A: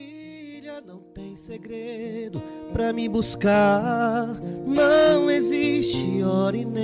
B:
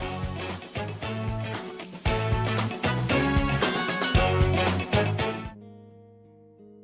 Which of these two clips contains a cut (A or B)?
B